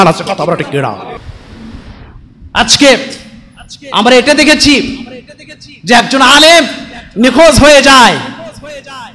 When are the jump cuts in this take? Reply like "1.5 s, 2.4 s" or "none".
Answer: 1.2 s